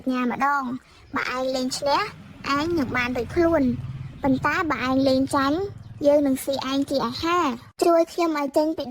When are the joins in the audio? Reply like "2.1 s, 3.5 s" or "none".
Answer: 7.7 s